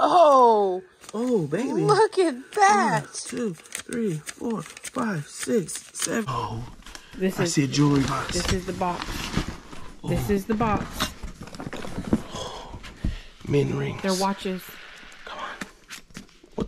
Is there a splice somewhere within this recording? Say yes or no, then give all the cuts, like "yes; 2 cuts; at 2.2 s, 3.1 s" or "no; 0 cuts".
yes; 1 cut; at 6.2 s